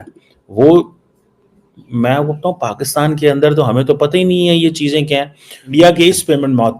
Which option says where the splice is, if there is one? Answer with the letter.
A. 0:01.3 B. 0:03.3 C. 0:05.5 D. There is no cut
C